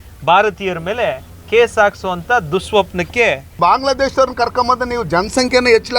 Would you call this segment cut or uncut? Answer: cut